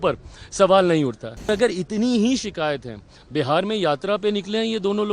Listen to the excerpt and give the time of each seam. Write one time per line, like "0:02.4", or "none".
0:01.5